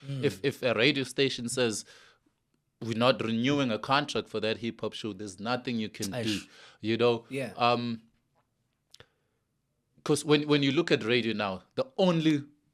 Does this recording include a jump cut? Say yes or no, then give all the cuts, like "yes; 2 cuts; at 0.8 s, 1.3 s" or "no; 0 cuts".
no; 0 cuts